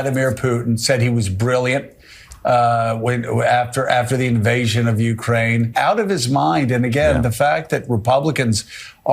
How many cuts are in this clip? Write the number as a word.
one